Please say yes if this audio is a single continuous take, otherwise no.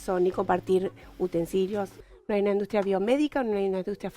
no